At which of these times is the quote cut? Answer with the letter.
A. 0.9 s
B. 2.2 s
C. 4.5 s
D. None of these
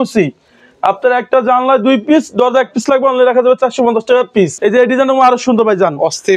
C